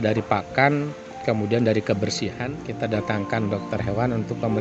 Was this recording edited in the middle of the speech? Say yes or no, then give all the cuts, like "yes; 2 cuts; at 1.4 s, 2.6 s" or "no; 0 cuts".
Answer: yes; 1 cut; at 2.5 s